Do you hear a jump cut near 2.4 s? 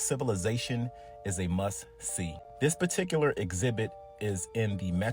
yes; 1 cut; at 2.4 s

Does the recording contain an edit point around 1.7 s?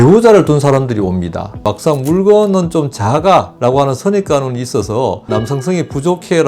yes; 1 cut; at 1.7 s

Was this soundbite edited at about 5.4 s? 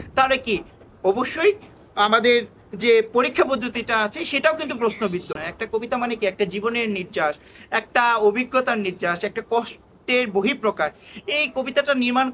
yes; 1 cut; at 5.4 s

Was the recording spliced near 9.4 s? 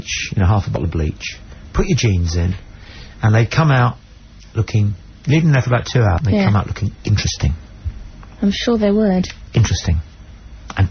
no; 0 cuts

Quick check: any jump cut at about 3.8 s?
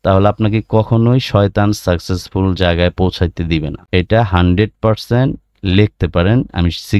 yes; 1 cut; at 3.8 s

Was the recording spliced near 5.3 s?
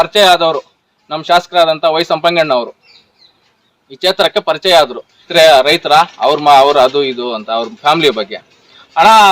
yes; 1 cut; at 5.3 s

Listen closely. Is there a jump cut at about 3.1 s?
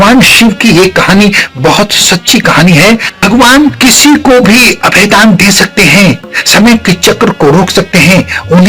yes; 1 cut; at 3.1 s

